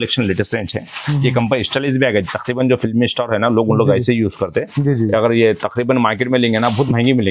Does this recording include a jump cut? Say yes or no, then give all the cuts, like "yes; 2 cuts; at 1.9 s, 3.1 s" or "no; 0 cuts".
no; 0 cuts